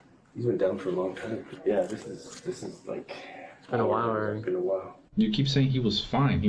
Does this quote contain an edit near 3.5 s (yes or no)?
no